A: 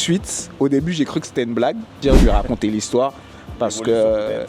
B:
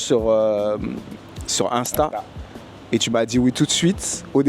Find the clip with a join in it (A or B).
A